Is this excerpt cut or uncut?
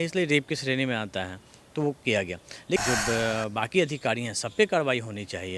cut